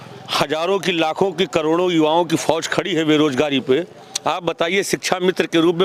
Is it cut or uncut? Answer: uncut